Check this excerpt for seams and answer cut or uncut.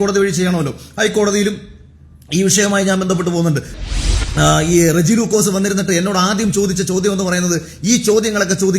cut